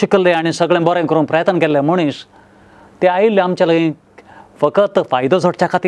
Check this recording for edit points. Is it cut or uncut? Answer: uncut